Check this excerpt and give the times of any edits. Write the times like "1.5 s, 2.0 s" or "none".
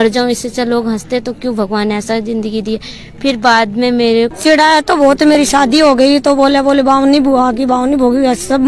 4.3 s